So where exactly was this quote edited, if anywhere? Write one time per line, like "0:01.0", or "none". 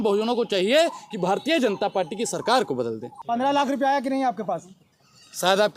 0:03.1